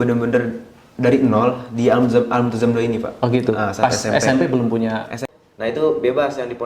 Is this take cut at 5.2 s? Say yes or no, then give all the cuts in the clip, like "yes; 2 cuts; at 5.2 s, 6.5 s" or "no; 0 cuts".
yes; 1 cut; at 5.2 s